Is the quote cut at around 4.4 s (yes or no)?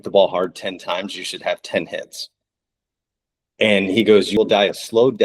yes